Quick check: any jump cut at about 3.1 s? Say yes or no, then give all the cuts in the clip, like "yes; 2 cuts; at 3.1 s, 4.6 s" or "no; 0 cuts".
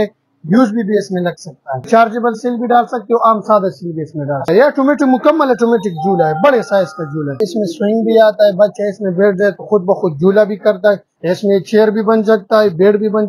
no; 4 cuts; at 1.8 s, 4.5 s, 7.4 s, 11.1 s